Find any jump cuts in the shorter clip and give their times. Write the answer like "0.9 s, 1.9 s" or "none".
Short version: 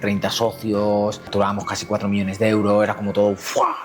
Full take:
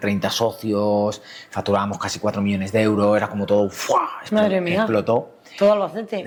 1.2 s